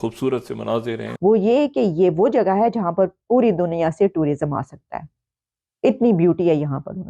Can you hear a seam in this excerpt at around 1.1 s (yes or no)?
yes